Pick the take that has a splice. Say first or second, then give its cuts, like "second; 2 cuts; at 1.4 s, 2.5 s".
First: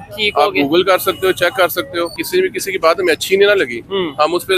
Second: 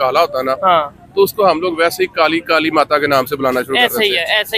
first; 1 cut; at 2.2 s